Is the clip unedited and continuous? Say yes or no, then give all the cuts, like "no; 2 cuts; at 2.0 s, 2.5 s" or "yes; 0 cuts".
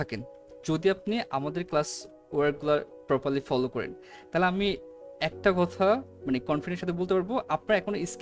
yes; 0 cuts